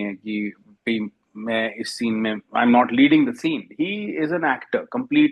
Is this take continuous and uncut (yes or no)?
yes